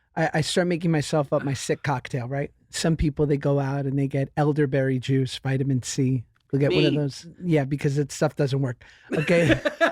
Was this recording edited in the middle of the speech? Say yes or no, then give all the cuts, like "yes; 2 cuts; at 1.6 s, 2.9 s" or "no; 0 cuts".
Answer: yes; 1 cut; at 7.3 s